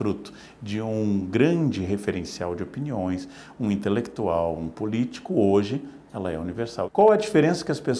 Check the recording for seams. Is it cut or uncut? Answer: cut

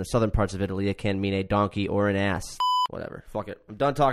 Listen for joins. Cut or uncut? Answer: cut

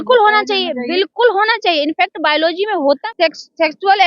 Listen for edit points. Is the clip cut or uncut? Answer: cut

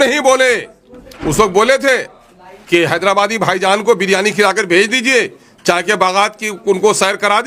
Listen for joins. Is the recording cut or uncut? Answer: uncut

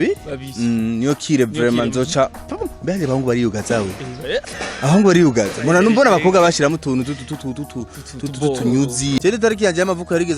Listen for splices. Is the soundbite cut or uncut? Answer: cut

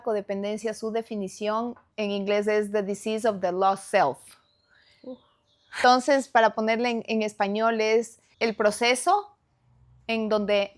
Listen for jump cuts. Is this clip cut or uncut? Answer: cut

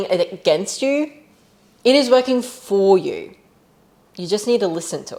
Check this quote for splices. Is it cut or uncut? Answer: uncut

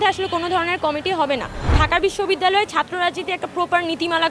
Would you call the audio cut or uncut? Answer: cut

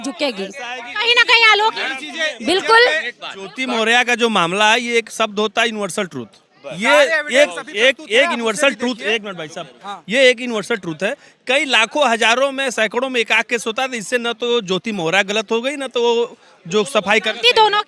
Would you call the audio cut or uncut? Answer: uncut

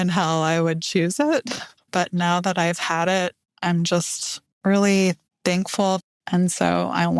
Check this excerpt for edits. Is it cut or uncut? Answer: cut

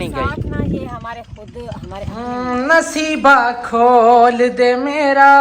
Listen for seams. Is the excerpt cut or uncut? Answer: cut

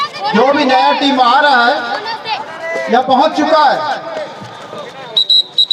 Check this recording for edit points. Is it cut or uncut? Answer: uncut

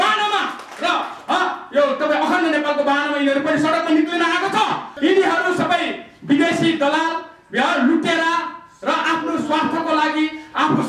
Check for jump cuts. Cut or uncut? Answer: cut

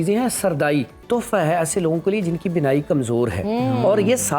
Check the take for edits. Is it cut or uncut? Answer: cut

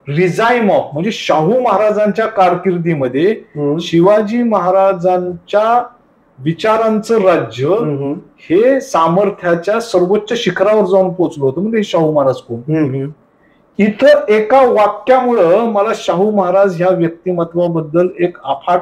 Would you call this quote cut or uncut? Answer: uncut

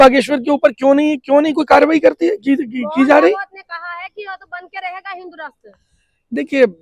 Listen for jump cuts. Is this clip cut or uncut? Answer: uncut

